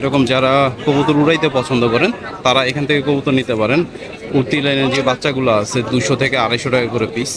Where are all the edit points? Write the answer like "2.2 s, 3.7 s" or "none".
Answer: none